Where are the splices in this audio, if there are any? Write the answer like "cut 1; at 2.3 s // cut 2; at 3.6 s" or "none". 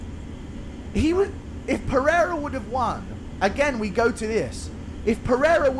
none